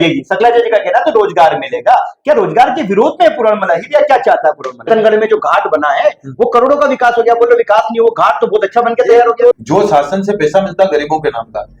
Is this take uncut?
no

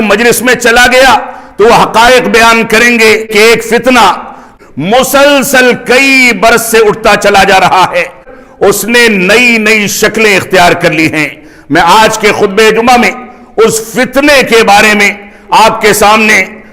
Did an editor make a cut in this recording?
yes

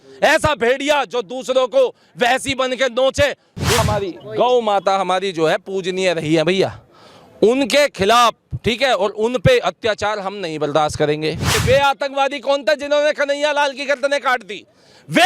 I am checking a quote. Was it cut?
yes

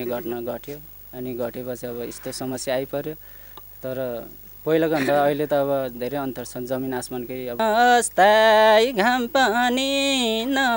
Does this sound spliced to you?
yes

